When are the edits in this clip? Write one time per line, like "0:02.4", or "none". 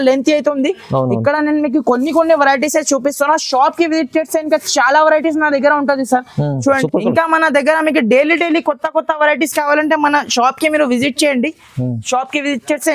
0:06.8